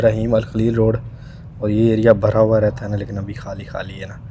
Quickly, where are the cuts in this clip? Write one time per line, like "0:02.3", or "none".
none

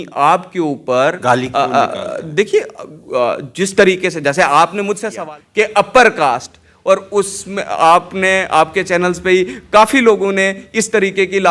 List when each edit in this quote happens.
0:05.1

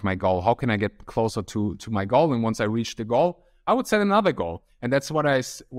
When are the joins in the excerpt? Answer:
none

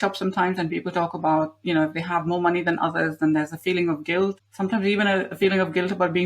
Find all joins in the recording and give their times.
0:04.4

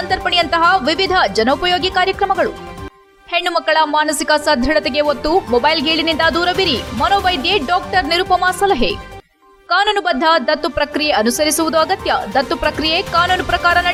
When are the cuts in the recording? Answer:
none

